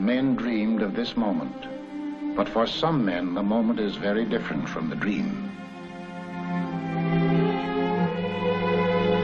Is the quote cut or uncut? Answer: cut